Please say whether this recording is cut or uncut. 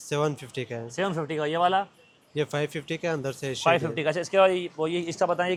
uncut